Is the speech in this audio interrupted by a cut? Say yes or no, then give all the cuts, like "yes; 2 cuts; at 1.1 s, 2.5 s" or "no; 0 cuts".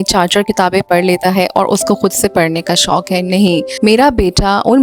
no; 0 cuts